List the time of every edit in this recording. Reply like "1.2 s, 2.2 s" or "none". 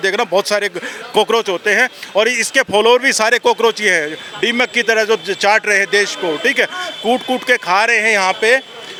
none